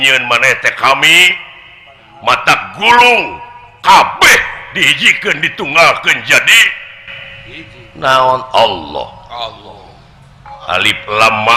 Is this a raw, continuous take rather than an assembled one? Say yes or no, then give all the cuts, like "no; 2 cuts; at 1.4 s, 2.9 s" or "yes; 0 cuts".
no; 1 cut; at 10.5 s